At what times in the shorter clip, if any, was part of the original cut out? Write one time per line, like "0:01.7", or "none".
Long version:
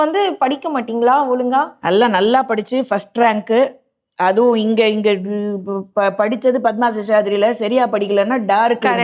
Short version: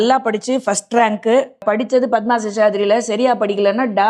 0:01.6